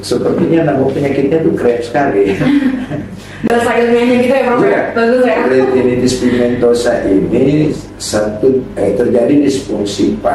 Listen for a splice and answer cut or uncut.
uncut